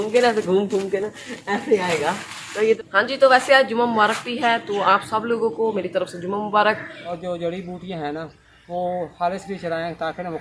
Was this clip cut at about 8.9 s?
no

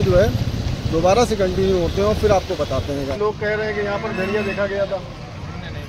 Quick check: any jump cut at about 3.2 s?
yes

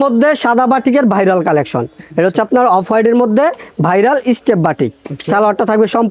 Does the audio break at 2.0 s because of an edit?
no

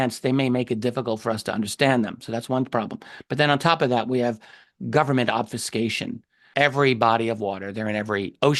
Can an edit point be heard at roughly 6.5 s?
yes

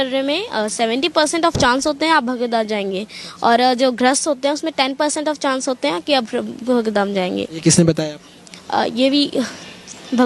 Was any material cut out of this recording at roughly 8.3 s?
no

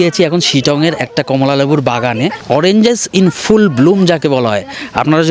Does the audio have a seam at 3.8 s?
no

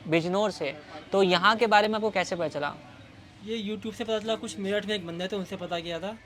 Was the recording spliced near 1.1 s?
no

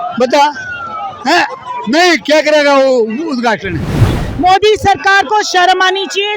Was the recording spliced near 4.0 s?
yes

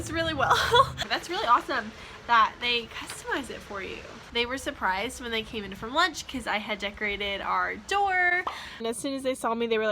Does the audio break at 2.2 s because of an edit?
no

